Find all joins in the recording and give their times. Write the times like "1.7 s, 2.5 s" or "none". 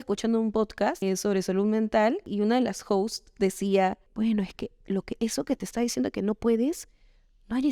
1.0 s, 2.3 s, 4.1 s